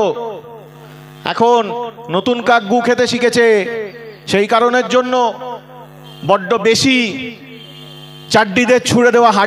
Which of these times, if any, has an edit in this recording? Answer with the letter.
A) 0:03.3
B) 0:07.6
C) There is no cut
C